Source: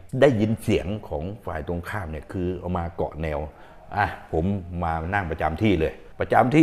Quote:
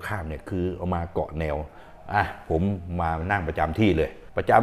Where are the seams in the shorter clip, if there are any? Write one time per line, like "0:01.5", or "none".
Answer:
none

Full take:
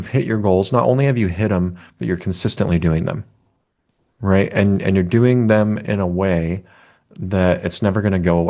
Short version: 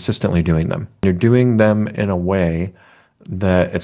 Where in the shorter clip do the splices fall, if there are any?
0:01.0

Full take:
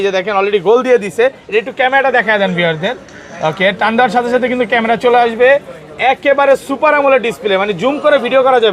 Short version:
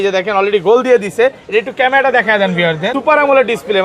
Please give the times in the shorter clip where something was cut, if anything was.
0:02.9

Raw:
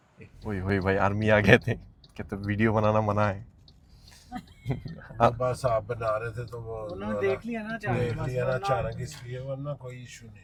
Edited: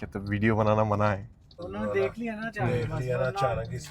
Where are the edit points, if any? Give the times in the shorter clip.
0:01.6

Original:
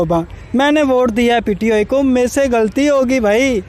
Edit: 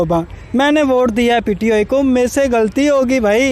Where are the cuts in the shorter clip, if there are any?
none

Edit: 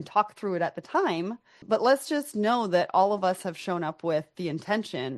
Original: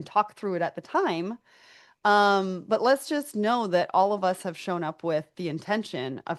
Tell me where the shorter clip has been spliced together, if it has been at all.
0:01.6

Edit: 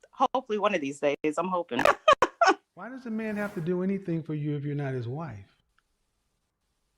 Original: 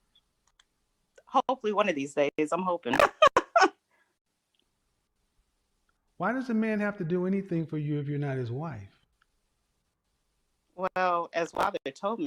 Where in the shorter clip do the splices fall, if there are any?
0:03.0

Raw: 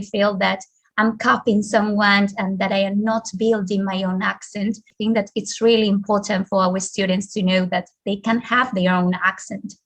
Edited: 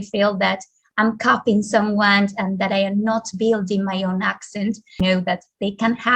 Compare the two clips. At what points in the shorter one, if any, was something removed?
0:05.0

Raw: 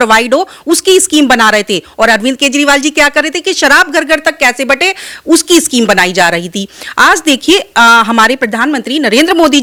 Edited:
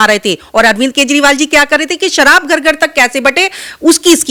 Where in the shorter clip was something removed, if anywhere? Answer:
none

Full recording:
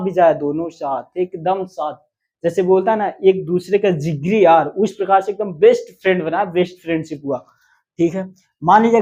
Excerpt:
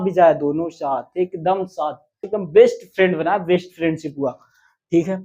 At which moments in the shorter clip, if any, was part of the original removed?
0:02.3

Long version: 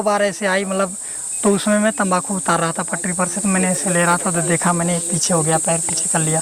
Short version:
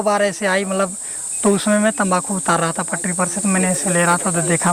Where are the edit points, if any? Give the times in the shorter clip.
none

